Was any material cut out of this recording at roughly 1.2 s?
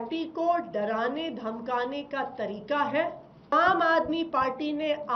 no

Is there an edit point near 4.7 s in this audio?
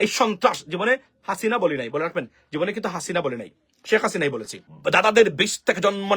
yes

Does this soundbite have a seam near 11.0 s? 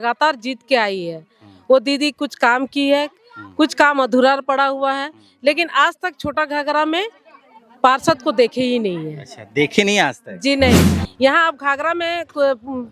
yes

